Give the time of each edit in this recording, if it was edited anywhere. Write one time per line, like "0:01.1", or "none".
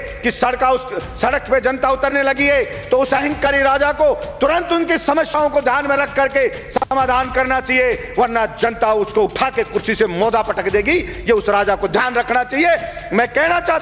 none